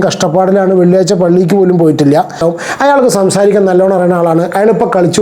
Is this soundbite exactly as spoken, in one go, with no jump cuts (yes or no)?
no